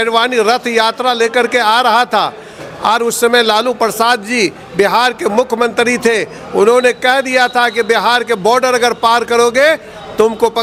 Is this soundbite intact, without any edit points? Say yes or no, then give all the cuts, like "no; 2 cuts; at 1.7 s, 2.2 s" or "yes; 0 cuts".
yes; 0 cuts